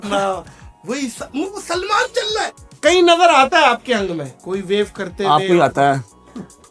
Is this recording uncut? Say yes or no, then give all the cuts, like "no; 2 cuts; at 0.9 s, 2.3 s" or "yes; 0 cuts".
no; 2 cuts; at 2.6 s, 4.3 s